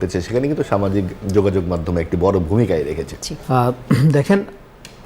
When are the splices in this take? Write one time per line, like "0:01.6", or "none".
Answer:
0:03.7